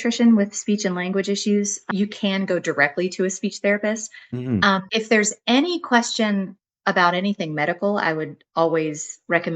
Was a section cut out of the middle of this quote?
no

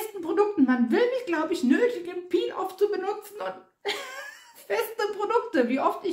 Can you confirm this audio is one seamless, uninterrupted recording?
yes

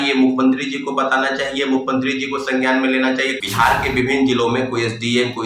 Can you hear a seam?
yes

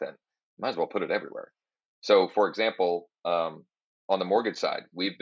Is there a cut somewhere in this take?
no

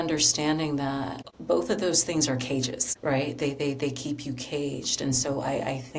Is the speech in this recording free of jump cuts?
no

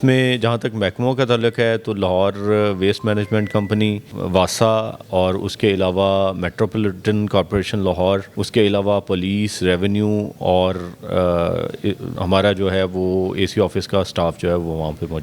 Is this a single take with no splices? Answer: no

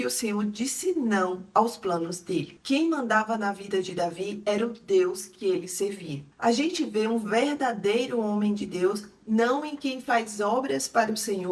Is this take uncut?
no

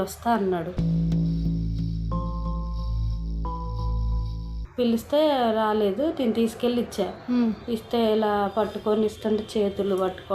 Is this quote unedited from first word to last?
no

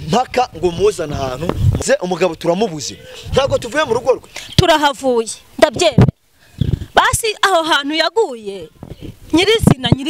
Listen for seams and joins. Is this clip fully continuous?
no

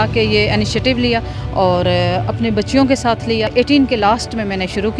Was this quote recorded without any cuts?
no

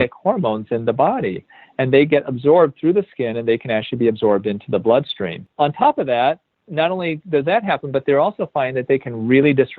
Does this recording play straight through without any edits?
no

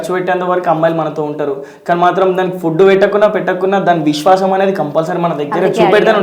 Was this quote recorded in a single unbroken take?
yes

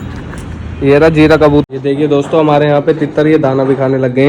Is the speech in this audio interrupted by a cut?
yes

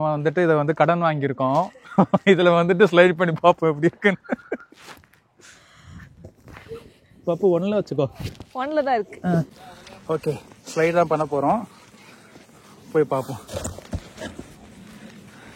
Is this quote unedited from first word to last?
yes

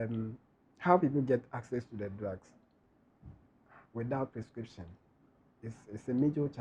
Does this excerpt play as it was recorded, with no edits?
yes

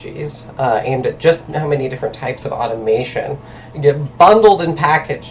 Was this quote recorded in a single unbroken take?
yes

